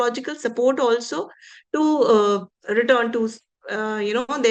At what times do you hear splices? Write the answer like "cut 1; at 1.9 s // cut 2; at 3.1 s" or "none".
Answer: none